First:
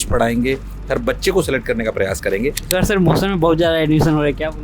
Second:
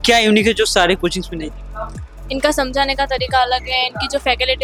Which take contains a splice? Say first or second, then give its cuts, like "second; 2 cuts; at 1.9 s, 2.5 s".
first; 1 cut; at 2.6 s